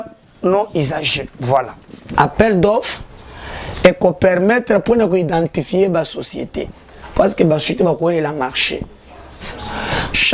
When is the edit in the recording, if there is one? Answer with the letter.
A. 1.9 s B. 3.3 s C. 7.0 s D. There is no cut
A